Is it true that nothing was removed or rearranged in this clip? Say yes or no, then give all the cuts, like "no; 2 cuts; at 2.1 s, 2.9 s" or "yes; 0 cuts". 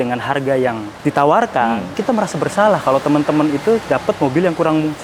yes; 0 cuts